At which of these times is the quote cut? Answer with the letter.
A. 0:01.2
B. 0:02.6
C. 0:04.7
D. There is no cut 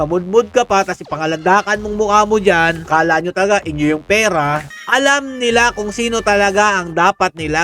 C